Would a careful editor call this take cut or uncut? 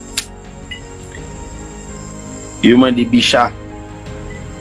cut